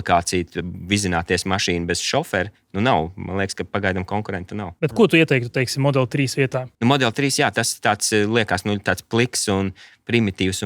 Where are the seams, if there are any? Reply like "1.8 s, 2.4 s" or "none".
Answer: none